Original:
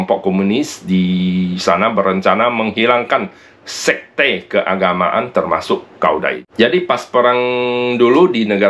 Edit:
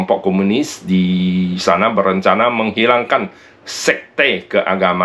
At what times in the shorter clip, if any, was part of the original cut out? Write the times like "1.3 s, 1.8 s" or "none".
none